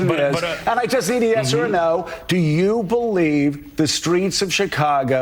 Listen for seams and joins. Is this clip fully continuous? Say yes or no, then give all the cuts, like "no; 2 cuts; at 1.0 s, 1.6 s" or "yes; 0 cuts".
yes; 0 cuts